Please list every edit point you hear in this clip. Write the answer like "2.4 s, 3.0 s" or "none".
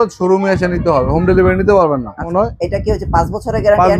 2.3 s